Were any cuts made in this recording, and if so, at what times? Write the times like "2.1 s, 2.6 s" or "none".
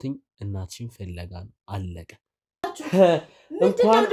2.7 s